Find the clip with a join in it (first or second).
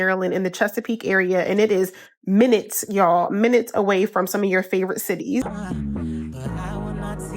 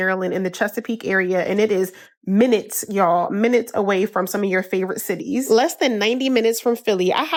first